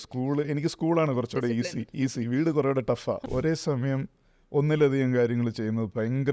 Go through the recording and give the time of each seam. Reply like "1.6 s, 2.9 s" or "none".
3.2 s

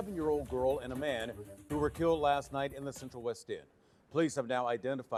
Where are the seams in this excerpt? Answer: none

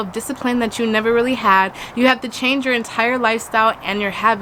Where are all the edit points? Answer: none

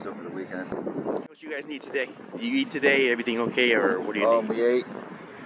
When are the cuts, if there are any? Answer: 1.4 s

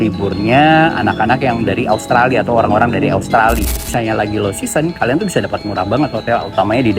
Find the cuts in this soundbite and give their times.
3.9 s

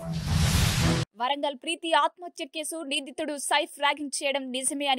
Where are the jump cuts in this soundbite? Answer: 1.1 s

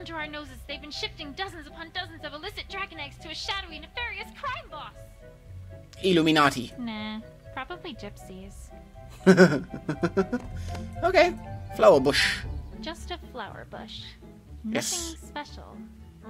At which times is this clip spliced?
12.9 s

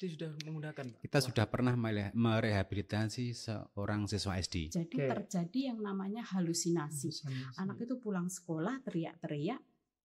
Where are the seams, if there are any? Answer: 4.7 s

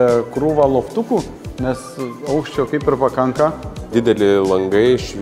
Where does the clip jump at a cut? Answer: 3.9 s

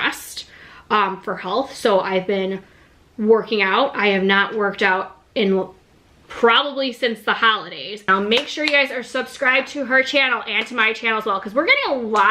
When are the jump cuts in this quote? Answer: 8.0 s

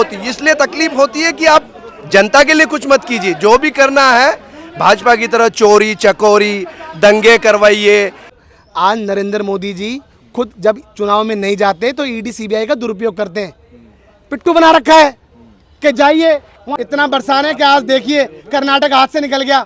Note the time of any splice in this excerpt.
8.3 s, 16.7 s

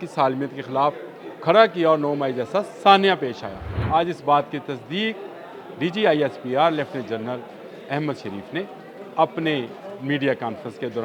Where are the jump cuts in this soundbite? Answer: 3.7 s

